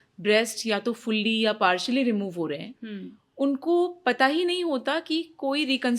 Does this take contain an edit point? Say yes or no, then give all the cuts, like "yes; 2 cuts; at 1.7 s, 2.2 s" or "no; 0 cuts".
no; 0 cuts